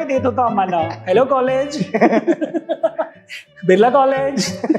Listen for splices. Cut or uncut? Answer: uncut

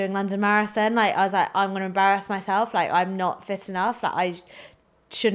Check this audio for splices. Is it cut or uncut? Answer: uncut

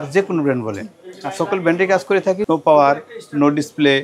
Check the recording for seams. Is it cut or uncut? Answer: cut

